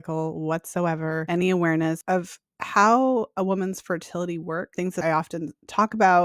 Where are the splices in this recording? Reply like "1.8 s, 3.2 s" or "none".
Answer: 1.2 s, 2.0 s, 4.9 s